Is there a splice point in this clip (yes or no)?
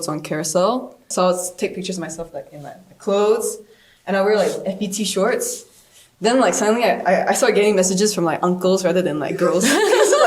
yes